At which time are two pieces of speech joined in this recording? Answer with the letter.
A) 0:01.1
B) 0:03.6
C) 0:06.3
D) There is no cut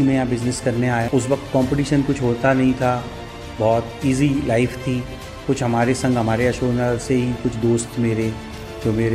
A